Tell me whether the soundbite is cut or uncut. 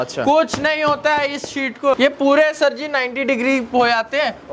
cut